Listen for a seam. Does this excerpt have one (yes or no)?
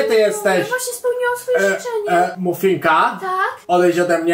yes